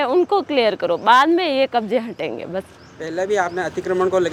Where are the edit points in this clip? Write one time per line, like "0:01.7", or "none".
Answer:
none